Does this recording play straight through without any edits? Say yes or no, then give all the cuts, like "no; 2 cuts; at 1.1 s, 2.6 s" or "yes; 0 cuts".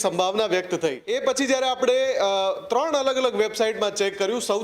no; 1 cut; at 1.0 s